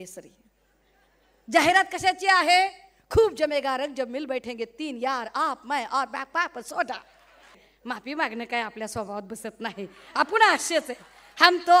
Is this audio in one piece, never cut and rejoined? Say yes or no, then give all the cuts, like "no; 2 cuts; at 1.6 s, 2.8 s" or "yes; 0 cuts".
no; 1 cut; at 7.7 s